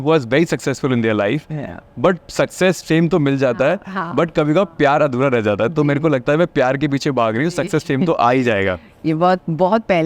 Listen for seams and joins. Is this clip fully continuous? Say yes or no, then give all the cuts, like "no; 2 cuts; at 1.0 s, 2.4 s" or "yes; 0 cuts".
yes; 0 cuts